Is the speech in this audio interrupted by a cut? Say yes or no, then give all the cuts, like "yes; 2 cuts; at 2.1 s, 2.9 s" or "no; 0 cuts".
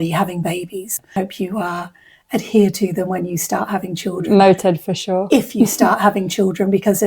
yes; 1 cut; at 1.1 s